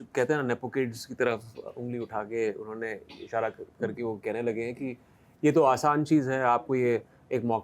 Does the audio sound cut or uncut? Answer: uncut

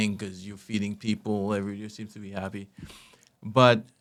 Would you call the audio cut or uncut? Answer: uncut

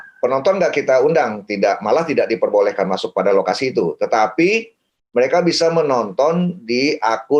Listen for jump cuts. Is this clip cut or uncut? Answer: uncut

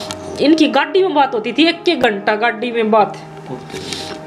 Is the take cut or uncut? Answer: uncut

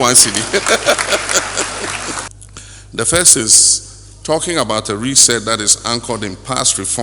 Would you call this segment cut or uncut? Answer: cut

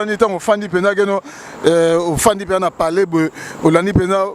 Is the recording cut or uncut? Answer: uncut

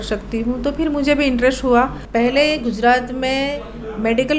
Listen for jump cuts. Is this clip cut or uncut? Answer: cut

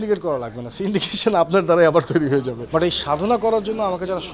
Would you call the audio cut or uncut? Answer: cut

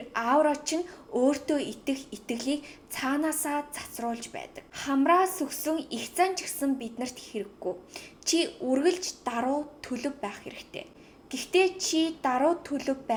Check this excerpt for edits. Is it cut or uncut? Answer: uncut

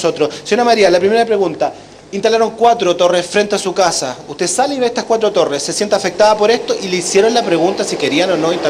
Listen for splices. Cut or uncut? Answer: cut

